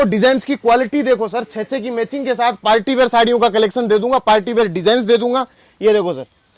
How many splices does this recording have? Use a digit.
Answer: 0